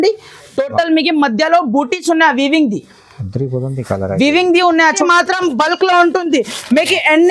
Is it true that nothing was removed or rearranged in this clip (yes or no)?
no